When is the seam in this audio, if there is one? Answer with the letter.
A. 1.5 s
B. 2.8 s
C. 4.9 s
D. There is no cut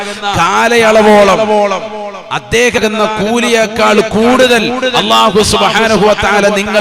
B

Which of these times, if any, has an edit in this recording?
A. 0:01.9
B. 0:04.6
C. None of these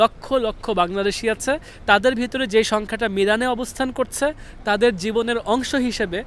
C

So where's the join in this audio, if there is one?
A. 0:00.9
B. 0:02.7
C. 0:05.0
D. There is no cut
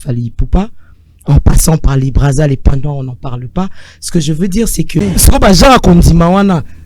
C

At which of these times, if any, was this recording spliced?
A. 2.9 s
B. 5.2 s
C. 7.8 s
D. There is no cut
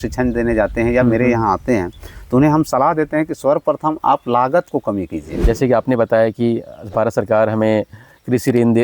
B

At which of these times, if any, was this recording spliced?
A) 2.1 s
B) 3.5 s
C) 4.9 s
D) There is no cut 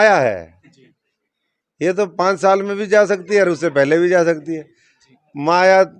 D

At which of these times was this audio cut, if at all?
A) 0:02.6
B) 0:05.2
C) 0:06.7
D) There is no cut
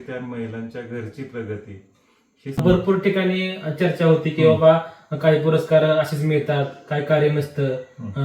A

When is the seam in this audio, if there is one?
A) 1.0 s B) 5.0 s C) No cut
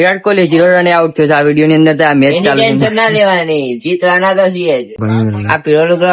B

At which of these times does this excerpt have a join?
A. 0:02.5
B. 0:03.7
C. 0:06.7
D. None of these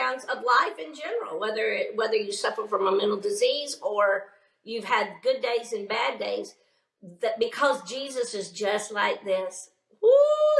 D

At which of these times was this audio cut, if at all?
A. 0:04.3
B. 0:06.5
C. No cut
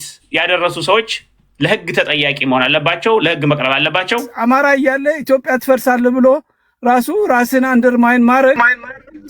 A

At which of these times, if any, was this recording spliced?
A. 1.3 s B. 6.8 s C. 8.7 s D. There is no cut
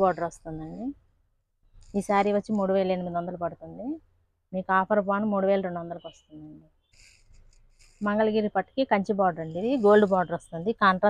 B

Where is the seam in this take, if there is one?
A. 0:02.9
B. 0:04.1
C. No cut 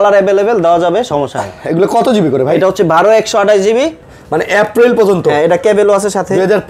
B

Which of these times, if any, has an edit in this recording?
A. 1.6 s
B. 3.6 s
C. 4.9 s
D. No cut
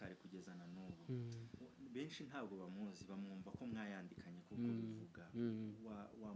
A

